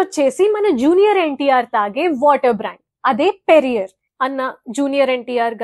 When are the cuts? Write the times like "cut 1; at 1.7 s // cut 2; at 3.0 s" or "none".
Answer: cut 1; at 4.0 s